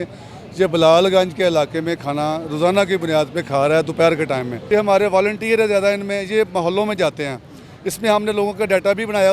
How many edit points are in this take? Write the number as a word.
one